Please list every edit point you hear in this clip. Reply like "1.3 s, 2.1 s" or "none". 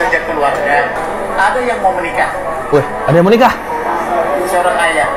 1.0 s